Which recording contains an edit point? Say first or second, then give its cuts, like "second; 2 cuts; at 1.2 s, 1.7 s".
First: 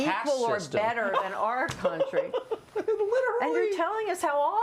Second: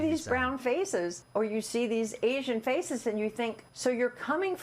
second; 2 cuts; at 1.2 s, 3.7 s